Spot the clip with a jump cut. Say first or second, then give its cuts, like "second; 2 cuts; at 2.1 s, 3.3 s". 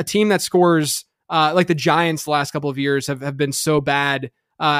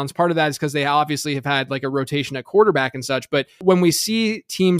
second; 1 cut; at 3.6 s